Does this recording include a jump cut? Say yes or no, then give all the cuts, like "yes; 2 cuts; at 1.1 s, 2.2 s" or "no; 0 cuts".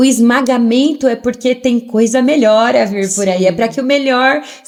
no; 0 cuts